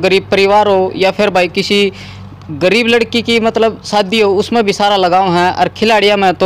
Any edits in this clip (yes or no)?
no